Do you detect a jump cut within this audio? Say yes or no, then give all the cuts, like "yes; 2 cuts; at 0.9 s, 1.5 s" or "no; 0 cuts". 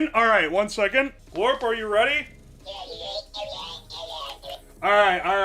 yes; 1 cut; at 1.2 s